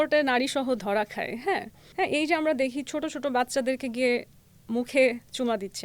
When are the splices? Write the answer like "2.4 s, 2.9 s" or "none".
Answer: 1.8 s

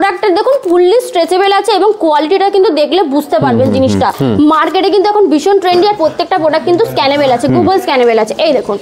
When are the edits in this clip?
4.2 s

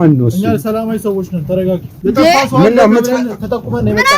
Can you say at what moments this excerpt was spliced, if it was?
1.9 s

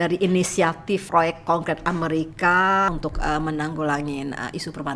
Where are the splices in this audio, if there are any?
1.0 s, 2.9 s

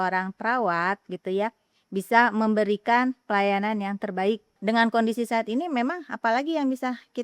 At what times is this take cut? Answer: 4.5 s

